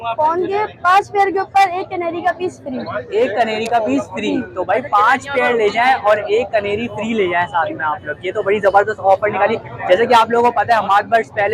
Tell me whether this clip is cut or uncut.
uncut